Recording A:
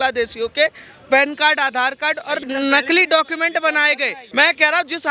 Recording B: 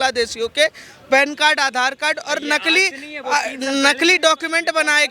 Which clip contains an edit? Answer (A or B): A